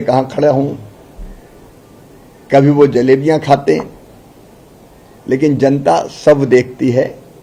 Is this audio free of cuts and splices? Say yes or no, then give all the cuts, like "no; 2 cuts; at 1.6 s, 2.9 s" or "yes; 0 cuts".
yes; 0 cuts